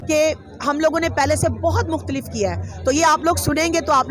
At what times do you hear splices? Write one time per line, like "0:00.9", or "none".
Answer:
none